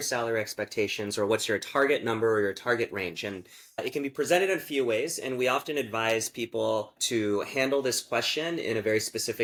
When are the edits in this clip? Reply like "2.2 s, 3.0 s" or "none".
none